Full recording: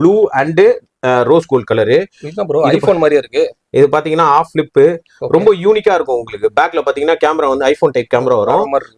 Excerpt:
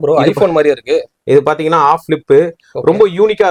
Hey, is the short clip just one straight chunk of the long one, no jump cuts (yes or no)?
yes